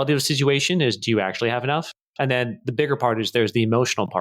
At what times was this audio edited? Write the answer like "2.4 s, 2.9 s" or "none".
2.0 s